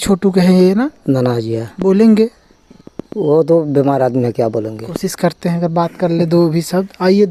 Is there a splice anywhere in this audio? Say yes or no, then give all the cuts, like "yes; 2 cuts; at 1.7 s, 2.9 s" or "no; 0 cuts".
no; 0 cuts